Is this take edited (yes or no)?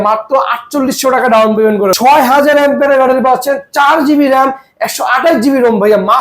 yes